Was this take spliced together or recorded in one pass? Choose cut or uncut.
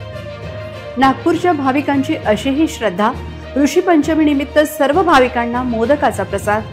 uncut